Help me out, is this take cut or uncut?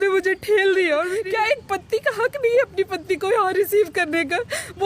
cut